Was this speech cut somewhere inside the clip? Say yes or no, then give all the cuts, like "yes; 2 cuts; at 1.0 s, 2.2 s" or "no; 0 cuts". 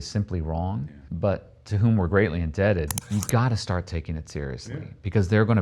yes; 2 cuts; at 0.9 s, 3.0 s